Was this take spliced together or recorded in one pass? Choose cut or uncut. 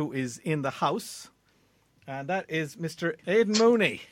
cut